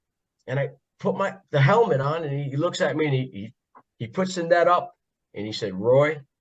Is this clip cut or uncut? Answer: uncut